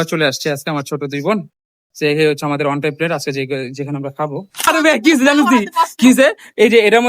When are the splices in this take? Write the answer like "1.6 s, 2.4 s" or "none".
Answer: 4.7 s